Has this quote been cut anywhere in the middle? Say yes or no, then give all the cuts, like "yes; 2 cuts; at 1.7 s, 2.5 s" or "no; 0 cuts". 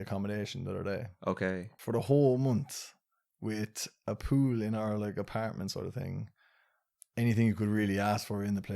yes; 1 cut; at 1.7 s